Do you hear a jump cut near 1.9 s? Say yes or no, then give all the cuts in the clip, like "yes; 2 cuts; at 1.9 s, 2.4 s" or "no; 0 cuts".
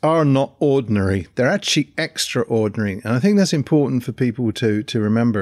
no; 0 cuts